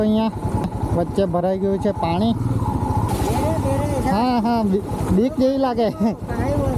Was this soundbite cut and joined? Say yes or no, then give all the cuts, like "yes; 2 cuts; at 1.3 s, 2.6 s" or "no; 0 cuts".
yes; 1 cut; at 3.1 s